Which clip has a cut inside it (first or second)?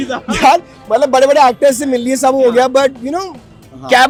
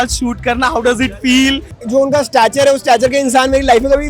second